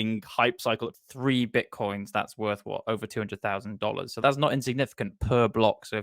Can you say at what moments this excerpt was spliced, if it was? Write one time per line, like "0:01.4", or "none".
0:00.9
0:03.1